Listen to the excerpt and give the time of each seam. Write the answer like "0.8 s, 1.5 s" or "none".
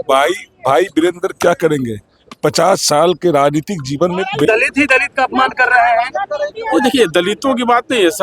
4.5 s